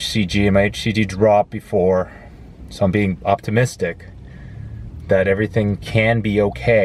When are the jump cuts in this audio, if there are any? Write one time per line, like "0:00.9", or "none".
none